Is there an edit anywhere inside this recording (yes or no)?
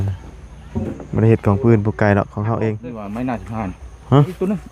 yes